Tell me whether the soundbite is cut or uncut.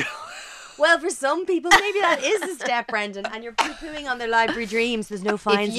uncut